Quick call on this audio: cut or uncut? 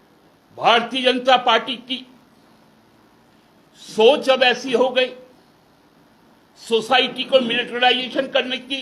uncut